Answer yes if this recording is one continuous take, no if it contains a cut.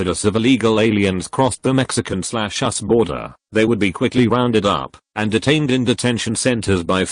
yes